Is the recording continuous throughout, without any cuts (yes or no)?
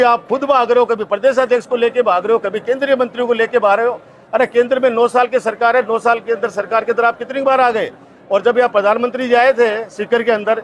yes